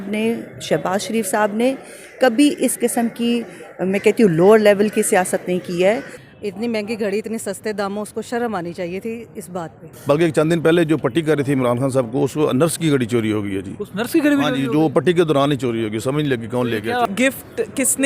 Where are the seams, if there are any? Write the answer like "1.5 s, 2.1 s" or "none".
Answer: 6.1 s, 9.9 s, 17.1 s